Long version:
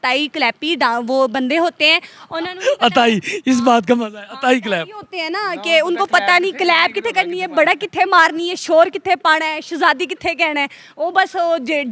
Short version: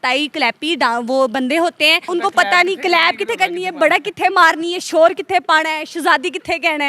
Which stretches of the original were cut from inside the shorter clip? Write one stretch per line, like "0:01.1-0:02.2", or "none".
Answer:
0:02.1-0:05.9